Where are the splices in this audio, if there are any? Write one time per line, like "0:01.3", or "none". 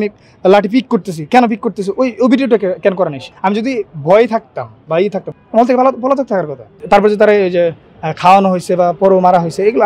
0:03.3
0:05.3
0:06.7